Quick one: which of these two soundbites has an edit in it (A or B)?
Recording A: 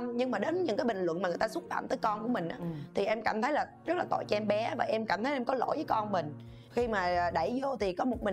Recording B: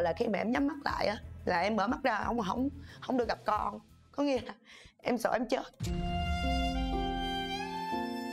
A